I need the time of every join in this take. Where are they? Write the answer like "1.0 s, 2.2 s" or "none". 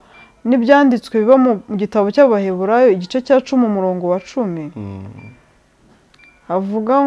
none